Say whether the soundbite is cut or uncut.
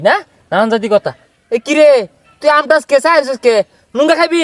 uncut